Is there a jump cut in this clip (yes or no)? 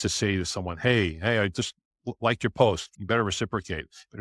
yes